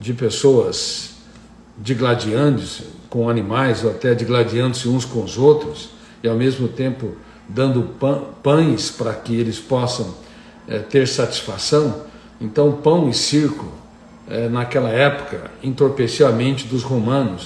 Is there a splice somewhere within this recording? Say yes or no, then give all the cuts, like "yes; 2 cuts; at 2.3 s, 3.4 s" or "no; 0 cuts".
no; 0 cuts